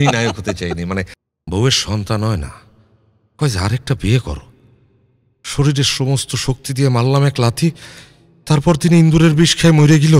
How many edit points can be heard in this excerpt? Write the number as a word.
one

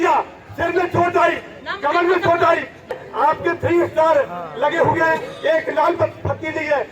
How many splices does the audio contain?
one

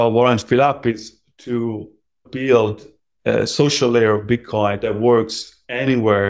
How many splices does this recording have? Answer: one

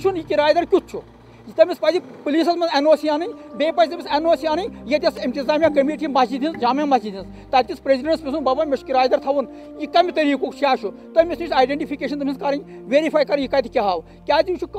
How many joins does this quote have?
zero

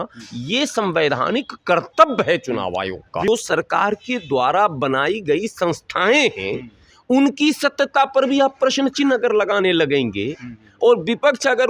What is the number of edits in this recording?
one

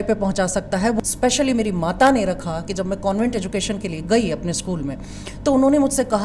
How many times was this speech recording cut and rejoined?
one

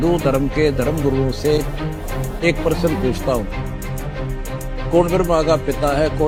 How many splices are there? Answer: zero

